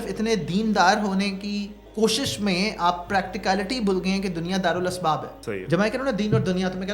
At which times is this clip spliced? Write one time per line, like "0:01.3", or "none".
0:01.8
0:05.3